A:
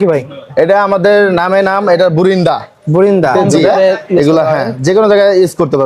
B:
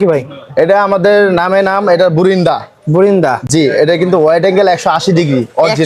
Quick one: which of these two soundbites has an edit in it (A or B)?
A